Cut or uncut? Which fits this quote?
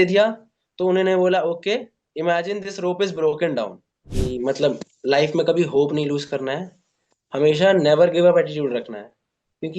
cut